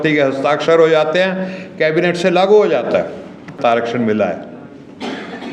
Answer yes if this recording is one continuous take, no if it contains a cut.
no